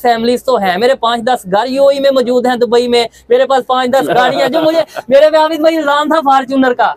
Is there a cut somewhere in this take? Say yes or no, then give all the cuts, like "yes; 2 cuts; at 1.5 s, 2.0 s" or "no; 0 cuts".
no; 0 cuts